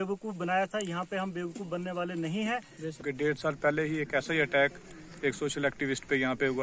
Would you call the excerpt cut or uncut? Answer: cut